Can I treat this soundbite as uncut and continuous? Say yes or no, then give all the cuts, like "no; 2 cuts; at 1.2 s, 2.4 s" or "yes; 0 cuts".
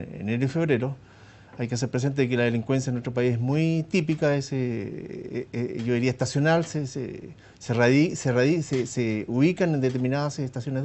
no; 1 cut; at 8.2 s